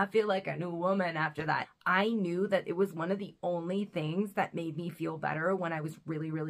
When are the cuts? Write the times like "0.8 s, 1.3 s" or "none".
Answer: 1.6 s